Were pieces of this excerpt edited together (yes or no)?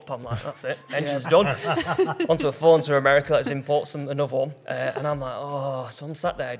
no